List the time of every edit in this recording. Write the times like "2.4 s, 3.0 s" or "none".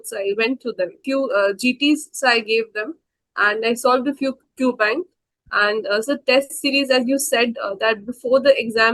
1.0 s